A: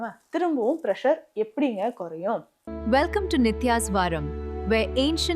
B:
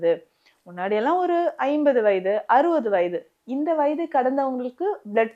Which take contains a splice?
A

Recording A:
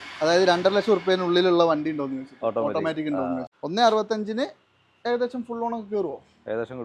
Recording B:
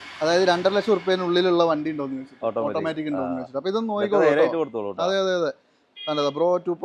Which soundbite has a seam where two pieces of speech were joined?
A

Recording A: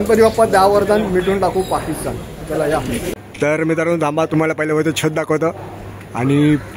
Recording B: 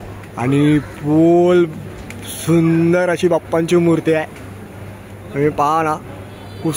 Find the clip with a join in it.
A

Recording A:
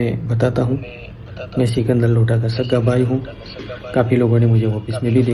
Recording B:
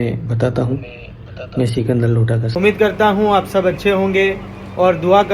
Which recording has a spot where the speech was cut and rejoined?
B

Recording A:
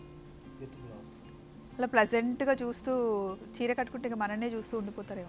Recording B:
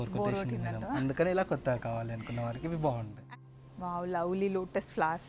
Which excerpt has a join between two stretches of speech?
B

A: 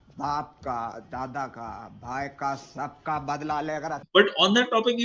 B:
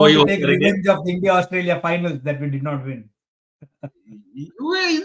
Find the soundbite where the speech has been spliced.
A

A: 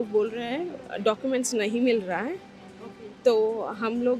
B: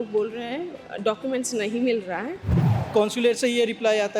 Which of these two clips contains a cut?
B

